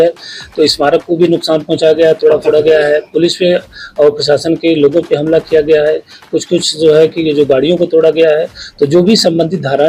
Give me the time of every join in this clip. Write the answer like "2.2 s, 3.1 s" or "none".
none